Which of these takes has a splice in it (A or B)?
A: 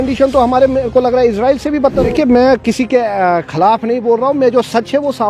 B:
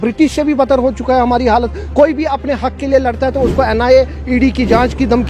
A